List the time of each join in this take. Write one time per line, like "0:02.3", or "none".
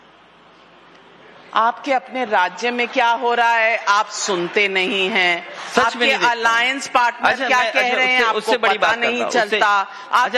none